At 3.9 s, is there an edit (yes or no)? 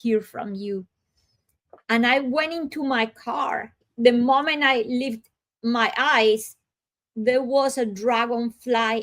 yes